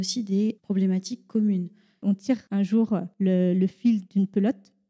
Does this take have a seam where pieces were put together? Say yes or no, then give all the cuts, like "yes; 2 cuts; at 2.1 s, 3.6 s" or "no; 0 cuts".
yes; 1 cut; at 2.0 s